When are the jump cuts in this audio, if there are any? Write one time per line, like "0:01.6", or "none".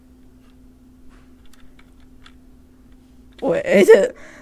0:01.4

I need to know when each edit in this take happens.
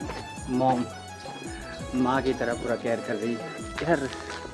0:03.6

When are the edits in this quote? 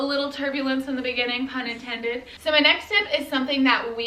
0:02.3

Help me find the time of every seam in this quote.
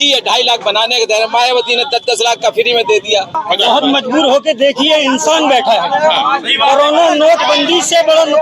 0:03.4

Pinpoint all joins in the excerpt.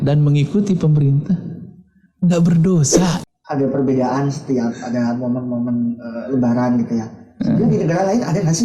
0:03.2

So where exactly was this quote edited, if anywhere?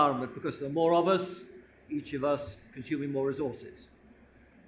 0:02.2

